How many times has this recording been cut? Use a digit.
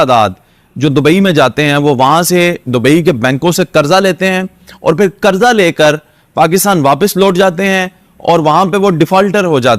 0